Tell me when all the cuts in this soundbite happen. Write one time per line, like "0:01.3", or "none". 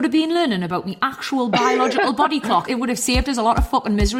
0:02.7